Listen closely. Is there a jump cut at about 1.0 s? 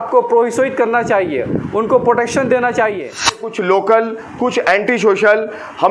no; 1 cut; at 3.4 s

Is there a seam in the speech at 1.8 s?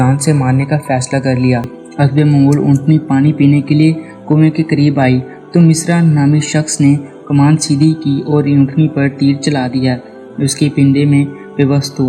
yes; 1 cut; at 1.8 s

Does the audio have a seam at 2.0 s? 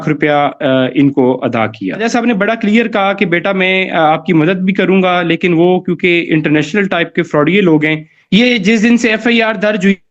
yes; 2 cuts; at 2.0 s, 8.1 s

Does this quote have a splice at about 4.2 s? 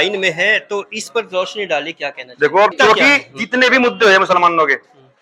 no; 1 cut; at 2.7 s

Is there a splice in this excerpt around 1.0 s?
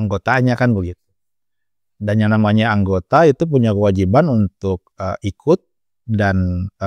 no; 0 cuts

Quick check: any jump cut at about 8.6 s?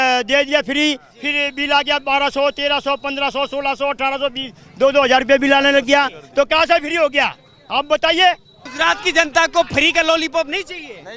yes; 1 cut; at 8.6 s

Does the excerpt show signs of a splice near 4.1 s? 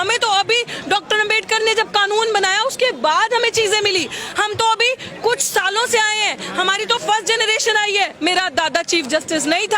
no; 1 cut; at 8.1 s

